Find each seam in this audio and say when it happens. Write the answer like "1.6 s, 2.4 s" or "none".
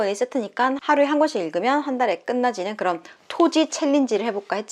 none